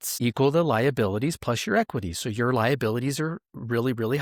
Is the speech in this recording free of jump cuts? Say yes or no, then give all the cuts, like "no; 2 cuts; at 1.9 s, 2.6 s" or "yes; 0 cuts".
yes; 0 cuts